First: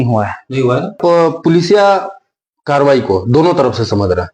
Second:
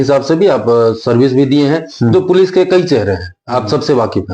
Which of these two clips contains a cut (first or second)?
first